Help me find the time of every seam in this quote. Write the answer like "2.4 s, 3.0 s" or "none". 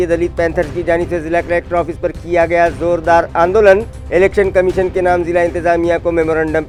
none